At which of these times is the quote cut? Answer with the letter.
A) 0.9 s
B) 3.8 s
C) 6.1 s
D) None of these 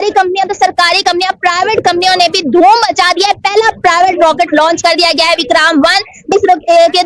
D